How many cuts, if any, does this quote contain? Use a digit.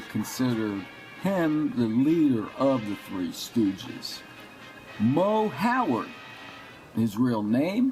0